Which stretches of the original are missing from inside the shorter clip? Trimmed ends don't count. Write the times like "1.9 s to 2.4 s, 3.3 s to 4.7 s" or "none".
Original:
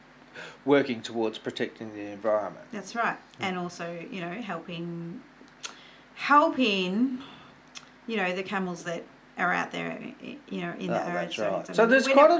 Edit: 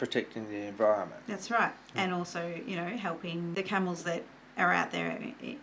5.0 s to 8.4 s